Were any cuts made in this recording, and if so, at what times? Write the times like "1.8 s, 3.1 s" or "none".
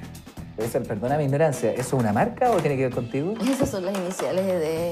none

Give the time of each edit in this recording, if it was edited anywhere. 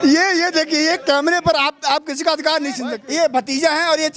2.9 s

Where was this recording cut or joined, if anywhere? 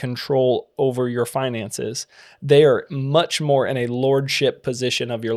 none

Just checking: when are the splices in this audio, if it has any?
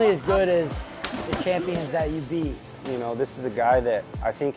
2.7 s

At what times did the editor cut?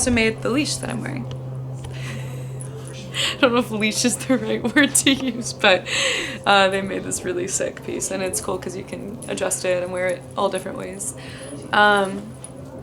none

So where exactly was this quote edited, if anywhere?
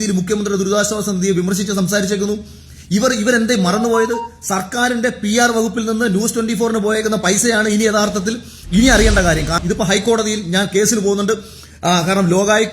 9.6 s

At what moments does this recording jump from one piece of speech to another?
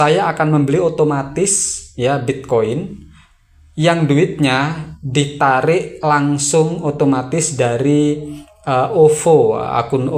none

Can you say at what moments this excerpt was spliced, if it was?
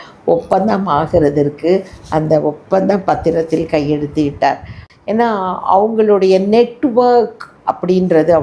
4.8 s

